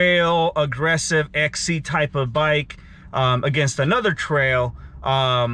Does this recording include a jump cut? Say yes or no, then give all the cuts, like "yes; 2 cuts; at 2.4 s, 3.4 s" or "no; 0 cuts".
no; 0 cuts